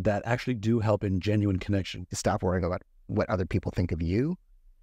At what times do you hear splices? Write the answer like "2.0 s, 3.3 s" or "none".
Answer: 1.9 s